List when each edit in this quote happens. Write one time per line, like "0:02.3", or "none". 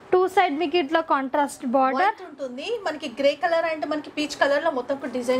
none